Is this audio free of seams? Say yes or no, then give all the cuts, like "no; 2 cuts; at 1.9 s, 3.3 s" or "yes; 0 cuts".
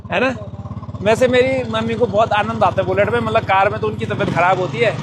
yes; 0 cuts